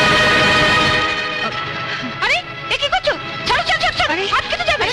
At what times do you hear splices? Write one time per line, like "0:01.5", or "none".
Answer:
none